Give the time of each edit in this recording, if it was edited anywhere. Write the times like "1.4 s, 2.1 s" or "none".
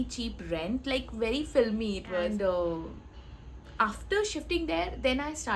2.3 s